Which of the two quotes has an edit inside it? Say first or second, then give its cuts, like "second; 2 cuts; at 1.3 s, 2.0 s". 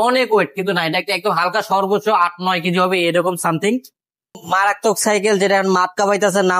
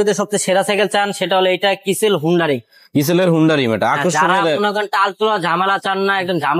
first; 1 cut; at 4.4 s